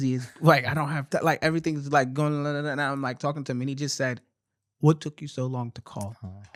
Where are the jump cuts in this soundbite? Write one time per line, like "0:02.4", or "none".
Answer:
none

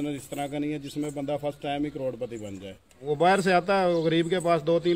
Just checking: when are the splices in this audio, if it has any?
0:02.9

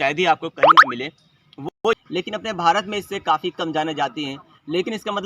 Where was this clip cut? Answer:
0:01.7

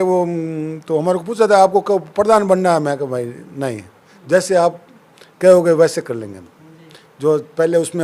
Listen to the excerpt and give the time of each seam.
none

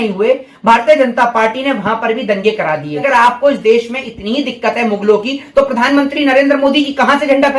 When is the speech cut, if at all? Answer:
0:03.0

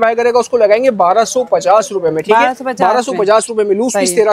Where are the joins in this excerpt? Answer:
none

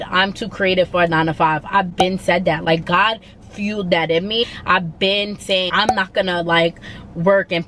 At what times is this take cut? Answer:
0:04.4
0:05.7

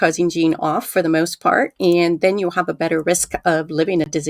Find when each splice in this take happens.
none

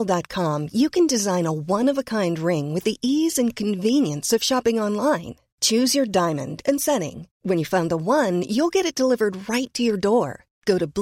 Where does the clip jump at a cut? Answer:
none

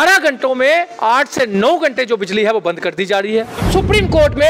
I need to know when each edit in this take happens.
0:03.6

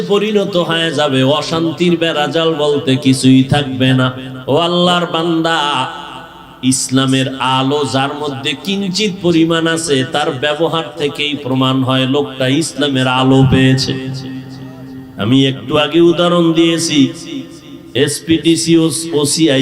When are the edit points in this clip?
0:04.3

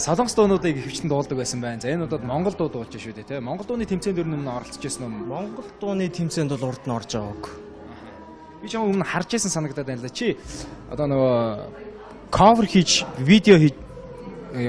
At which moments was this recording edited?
0:12.5

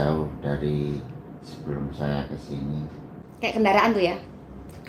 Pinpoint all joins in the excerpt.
0:03.1

